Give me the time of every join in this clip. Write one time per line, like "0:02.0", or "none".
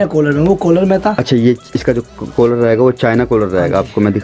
none